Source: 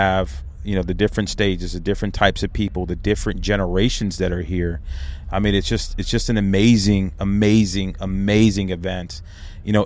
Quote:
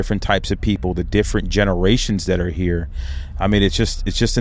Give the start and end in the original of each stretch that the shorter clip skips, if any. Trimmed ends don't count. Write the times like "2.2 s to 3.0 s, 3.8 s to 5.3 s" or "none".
none